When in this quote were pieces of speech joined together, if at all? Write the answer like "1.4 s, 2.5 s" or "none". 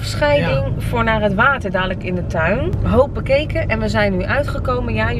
2.8 s